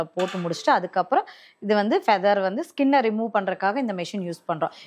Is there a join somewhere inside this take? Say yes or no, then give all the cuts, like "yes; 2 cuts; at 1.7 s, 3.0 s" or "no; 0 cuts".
no; 0 cuts